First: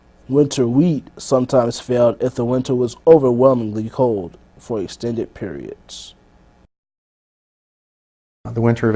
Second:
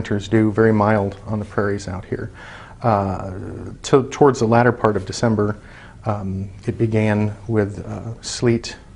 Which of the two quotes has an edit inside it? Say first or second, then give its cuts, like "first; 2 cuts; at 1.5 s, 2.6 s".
second; 1 cut; at 7.7 s